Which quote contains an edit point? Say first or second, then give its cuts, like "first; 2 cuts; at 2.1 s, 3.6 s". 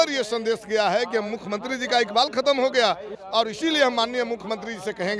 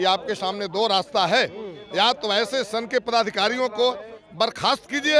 first; 1 cut; at 3.1 s